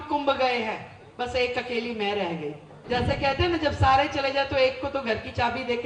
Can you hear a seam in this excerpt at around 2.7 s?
yes; 1 cut; at 2.7 s

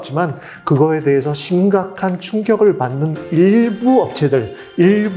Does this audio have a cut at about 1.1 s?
no; 0 cuts

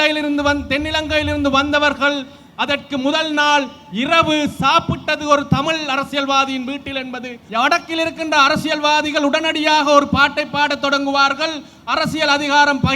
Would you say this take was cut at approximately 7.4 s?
yes; 1 cut; at 7.4 s

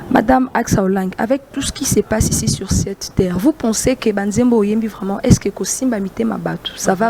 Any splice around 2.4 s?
no; 0 cuts

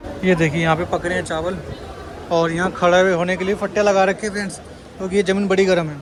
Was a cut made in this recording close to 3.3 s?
no; 0 cuts

